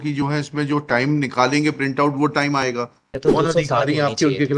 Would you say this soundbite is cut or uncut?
cut